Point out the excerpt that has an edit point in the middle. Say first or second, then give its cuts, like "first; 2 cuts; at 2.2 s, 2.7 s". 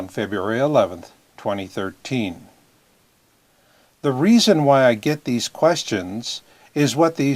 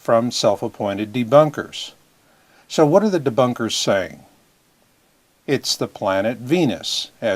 second; 1 cut; at 5.6 s